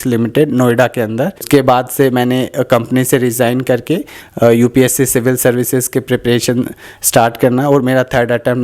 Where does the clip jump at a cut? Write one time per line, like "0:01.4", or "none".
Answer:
0:01.4